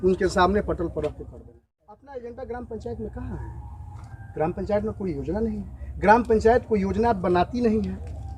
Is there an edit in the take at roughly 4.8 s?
no; 1 cut; at 1.9 s

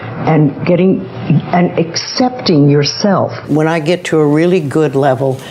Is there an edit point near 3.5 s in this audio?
yes; 1 cut; at 3.5 s

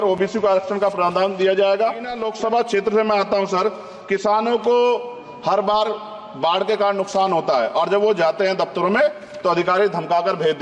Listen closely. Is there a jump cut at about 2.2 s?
yes; 1 cut; at 2.2 s

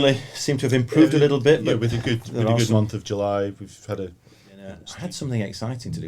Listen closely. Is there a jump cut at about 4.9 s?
yes; 1 cut; at 4.9 s

